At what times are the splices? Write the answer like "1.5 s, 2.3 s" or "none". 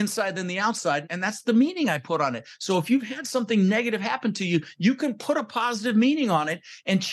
1.1 s